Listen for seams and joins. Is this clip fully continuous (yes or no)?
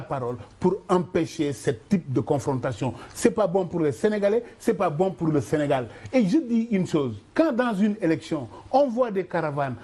yes